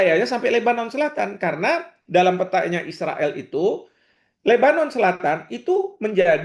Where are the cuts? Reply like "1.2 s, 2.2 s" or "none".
none